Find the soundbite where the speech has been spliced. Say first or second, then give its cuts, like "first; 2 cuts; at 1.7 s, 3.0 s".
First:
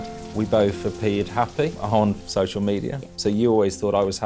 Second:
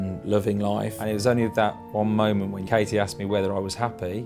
second; 1 cut; at 1.0 s